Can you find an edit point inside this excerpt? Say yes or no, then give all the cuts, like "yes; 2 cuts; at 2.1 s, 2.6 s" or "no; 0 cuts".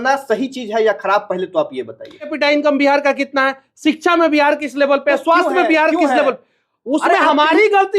yes; 1 cut; at 2.3 s